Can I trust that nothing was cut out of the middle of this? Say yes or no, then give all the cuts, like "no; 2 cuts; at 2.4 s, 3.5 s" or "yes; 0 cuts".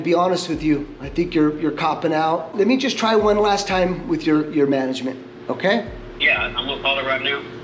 yes; 0 cuts